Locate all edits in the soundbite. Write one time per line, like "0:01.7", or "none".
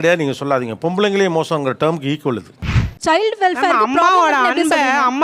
0:02.7